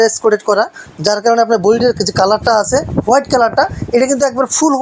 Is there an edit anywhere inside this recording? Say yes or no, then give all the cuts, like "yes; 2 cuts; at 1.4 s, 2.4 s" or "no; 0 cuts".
no; 0 cuts